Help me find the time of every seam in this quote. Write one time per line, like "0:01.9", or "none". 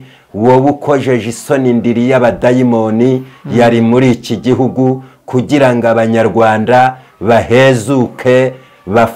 none